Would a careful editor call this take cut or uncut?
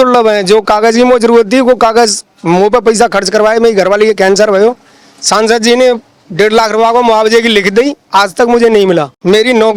uncut